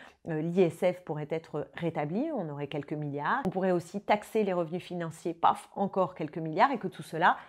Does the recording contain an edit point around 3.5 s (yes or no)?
yes